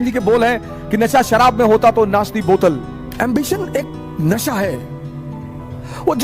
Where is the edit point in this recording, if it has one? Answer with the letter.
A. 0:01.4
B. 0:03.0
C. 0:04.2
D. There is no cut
B